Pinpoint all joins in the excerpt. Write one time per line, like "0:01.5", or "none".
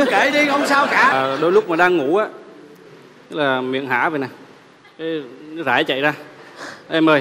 0:01.1